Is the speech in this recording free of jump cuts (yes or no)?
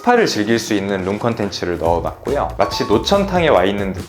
no